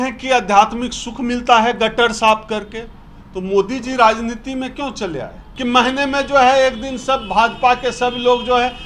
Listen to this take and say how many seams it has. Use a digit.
1